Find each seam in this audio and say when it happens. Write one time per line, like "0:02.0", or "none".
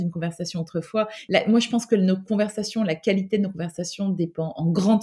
0:01.2